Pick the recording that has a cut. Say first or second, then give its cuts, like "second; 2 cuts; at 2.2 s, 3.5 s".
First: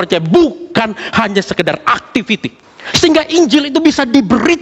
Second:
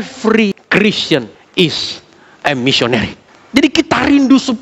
second; 1 cut; at 1.0 s